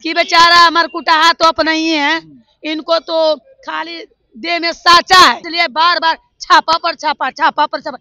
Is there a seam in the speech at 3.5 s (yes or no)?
no